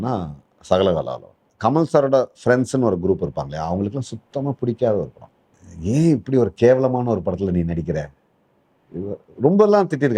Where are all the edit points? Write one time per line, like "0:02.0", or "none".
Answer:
0:01.4